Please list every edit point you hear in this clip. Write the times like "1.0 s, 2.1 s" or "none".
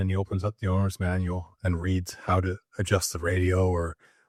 none